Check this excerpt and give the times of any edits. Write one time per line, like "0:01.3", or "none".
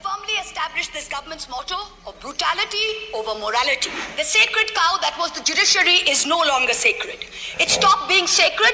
0:04.0